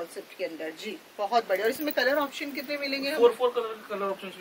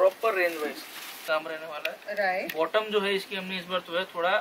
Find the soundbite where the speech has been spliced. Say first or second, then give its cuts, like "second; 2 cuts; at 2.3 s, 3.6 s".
second; 1 cut; at 1.3 s